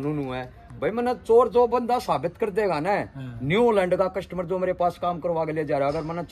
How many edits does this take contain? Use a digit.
0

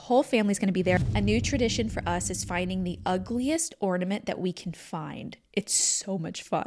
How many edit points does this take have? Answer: 1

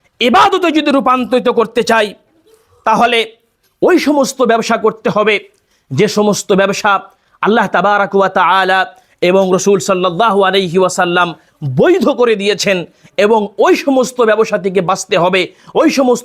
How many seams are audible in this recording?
0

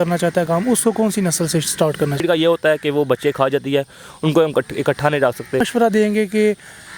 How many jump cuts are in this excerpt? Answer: 2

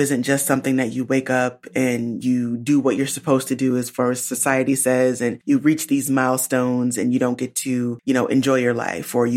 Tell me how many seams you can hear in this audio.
2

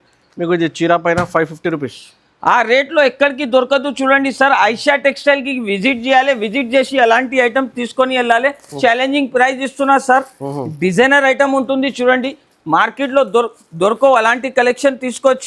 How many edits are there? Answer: 1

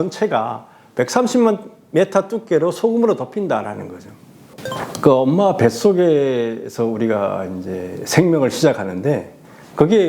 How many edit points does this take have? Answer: 1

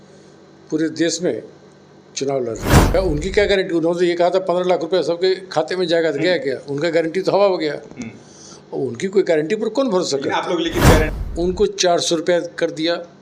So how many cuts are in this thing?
2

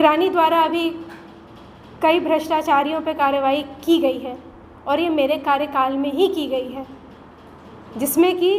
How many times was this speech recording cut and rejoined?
0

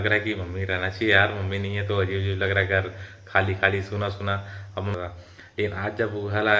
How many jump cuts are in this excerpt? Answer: 1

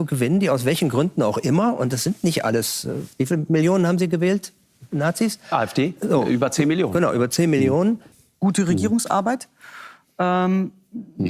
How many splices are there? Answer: 1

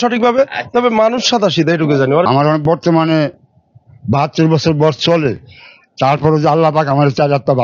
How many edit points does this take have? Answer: 1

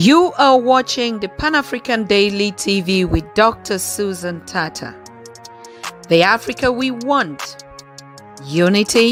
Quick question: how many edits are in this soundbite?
0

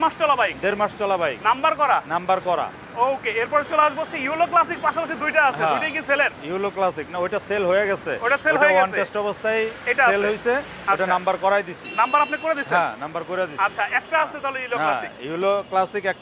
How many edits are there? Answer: 0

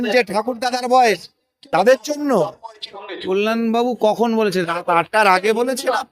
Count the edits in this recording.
1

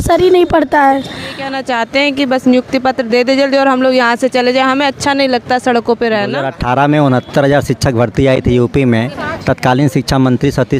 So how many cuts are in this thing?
2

